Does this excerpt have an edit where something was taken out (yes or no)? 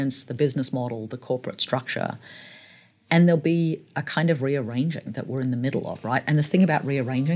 no